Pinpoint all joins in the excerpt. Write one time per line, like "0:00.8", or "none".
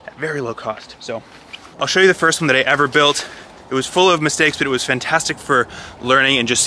none